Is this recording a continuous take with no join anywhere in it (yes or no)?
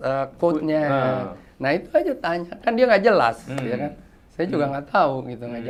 yes